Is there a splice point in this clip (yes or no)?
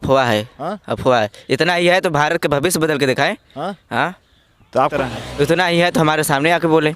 yes